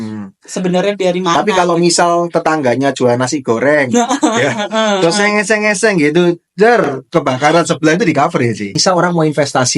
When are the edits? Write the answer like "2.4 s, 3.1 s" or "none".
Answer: 8.7 s